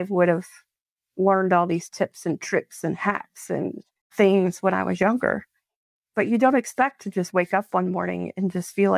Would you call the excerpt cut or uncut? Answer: cut